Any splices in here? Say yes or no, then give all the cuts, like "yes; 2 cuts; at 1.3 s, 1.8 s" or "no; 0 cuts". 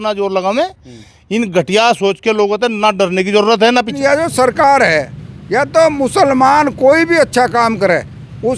yes; 1 cut; at 3.9 s